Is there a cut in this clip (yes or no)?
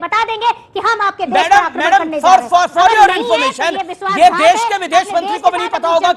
no